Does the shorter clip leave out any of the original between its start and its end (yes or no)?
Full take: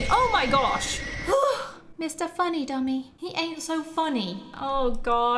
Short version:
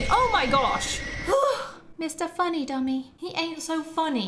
no